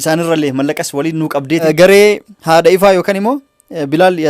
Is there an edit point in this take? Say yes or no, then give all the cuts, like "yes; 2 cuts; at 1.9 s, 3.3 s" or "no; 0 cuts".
yes; 1 cut; at 1.6 s